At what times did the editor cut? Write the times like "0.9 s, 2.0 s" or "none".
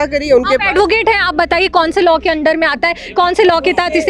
none